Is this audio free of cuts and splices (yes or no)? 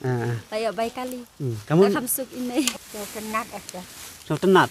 no